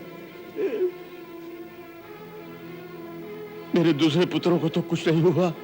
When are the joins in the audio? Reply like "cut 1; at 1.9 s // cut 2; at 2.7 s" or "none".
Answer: none